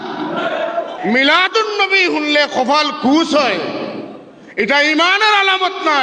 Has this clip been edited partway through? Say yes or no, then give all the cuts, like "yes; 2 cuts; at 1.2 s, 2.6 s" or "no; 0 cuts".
yes; 1 cut; at 0.9 s